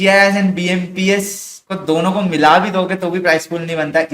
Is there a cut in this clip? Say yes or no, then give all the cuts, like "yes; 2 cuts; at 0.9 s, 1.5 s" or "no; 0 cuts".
no; 0 cuts